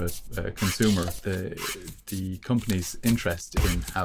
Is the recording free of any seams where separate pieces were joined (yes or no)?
no